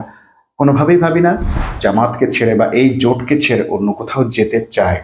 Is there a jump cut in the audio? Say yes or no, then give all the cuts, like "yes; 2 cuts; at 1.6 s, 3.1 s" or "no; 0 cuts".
yes; 1 cut; at 1.7 s